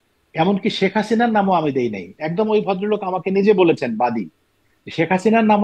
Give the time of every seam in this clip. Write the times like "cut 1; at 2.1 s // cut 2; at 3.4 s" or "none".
none

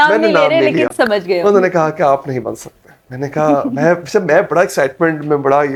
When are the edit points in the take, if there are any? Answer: none

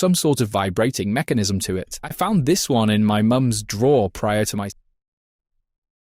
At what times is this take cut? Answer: cut 1; at 2.0 s

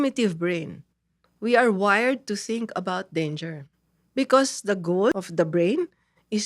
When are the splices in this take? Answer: cut 1; at 5.1 s

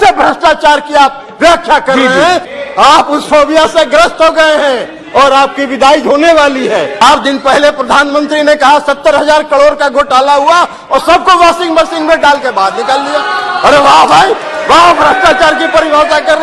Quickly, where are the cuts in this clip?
cut 1; at 2.5 s // cut 2; at 7.0 s

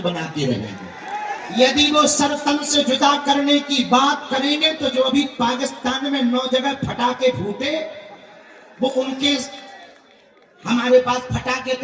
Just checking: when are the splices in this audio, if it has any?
cut 1; at 1.4 s

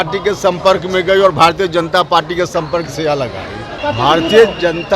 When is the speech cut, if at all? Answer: cut 1; at 3.8 s

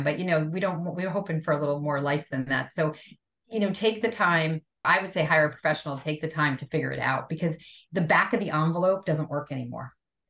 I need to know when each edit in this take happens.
cut 1; at 4.8 s

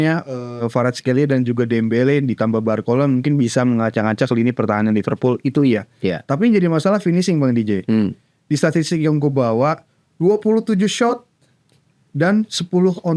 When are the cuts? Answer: none

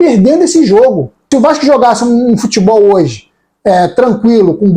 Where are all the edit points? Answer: cut 1; at 1.2 s

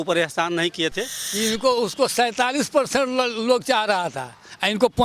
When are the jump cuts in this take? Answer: cut 1; at 1.2 s

